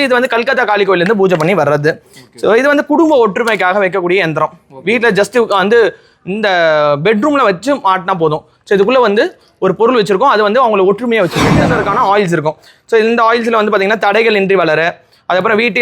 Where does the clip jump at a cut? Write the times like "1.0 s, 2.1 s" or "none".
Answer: 11.8 s